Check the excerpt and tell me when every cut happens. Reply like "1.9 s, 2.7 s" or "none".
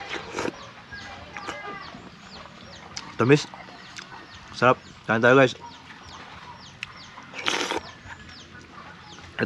none